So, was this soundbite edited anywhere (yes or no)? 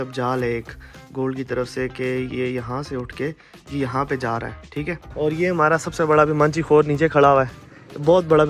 yes